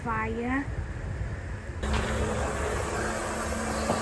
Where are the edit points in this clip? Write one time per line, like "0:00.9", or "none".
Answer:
0:01.8